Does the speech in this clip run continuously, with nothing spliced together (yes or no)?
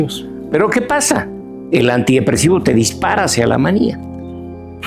yes